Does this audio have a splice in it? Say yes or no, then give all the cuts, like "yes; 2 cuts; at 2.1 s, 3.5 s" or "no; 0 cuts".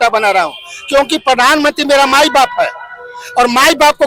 no; 0 cuts